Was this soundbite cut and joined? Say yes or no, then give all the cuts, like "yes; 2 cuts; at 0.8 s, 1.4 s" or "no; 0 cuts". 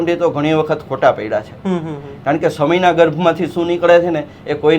no; 0 cuts